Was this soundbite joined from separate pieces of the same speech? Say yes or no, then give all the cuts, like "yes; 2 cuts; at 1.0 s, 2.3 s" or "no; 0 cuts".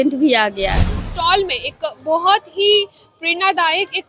yes; 1 cut; at 1.0 s